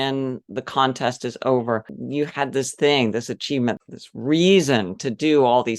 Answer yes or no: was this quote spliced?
yes